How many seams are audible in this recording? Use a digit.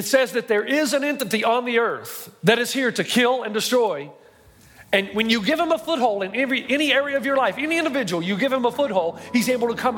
0